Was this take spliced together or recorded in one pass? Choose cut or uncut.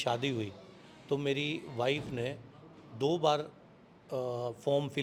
uncut